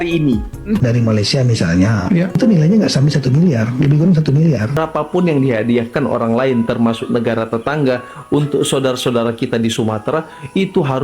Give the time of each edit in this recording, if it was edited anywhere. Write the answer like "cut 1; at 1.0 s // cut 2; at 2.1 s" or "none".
cut 1; at 0.8 s // cut 2; at 4.8 s